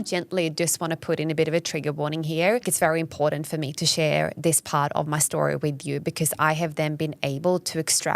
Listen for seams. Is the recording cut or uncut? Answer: cut